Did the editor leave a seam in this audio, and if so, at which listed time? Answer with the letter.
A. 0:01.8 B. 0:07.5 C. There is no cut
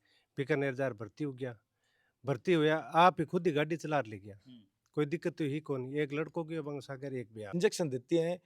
B